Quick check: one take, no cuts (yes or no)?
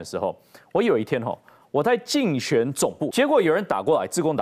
no